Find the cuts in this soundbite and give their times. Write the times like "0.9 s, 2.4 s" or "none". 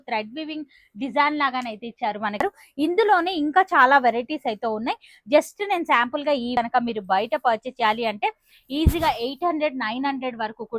2.4 s, 6.5 s